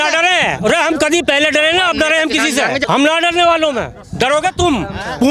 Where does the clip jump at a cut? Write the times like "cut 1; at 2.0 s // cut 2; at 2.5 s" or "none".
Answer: cut 1; at 2.8 s